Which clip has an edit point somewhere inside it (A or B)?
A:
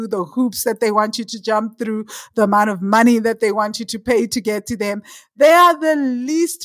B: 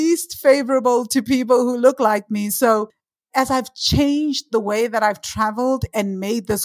B